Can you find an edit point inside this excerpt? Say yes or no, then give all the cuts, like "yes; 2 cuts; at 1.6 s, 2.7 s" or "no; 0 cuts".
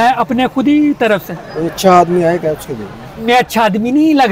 yes; 2 cuts; at 1.4 s, 3.1 s